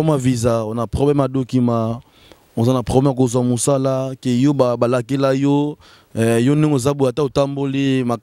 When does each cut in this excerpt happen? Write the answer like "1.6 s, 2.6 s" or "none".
none